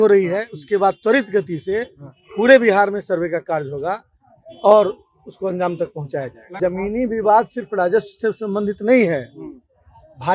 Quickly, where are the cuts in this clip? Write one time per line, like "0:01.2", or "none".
0:06.6